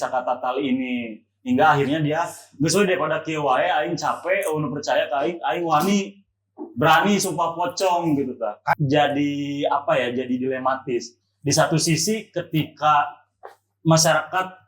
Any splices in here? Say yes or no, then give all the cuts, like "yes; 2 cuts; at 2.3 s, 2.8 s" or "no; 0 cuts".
yes; 1 cut; at 8.7 s